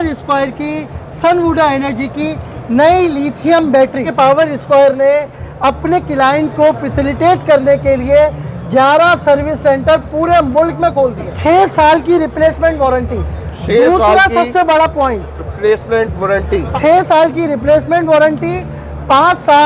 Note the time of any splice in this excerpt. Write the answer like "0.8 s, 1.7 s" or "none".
4.1 s, 11.3 s, 16.7 s